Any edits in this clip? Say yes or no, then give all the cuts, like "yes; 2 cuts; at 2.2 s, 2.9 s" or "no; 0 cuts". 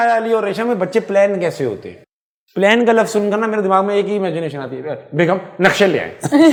no; 0 cuts